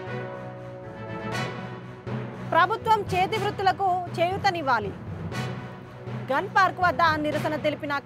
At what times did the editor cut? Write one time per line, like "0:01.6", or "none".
0:01.4